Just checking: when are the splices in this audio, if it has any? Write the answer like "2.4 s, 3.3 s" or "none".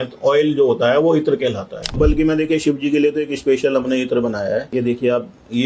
2.0 s, 4.7 s